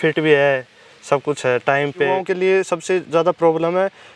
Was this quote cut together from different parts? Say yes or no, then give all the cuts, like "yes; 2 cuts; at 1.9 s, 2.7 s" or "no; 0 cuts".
yes; 1 cut; at 2.2 s